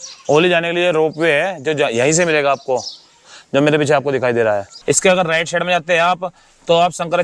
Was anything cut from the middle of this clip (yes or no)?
yes